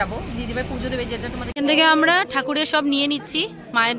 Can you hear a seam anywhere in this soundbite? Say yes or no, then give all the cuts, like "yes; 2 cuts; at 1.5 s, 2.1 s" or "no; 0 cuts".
yes; 1 cut; at 1.5 s